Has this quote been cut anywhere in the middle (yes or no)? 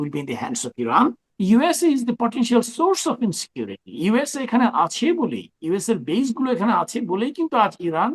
yes